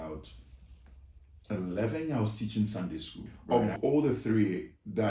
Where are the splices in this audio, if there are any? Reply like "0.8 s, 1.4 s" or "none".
3.3 s